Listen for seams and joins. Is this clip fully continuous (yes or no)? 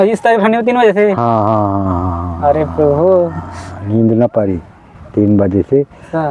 yes